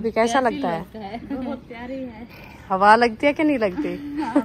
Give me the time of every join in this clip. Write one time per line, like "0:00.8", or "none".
none

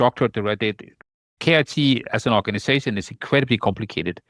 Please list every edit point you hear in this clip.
0:01.2

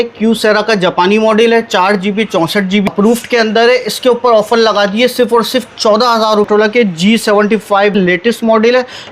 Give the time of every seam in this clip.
0:02.9
0:06.5
0:08.0

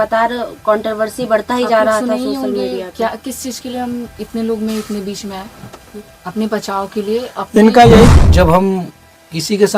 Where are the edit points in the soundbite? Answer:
0:08.1

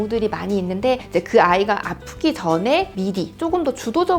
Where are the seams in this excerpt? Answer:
0:01.0

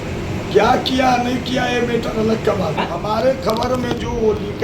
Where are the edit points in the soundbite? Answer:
0:02.8

